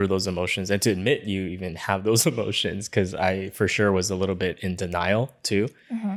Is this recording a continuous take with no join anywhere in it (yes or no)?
yes